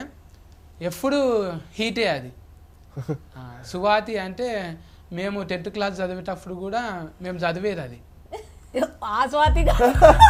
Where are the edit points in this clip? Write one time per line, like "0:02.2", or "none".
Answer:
none